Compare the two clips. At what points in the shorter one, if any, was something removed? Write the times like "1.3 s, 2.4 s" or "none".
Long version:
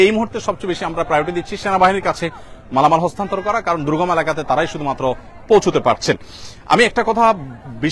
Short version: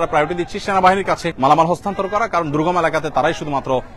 1.3 s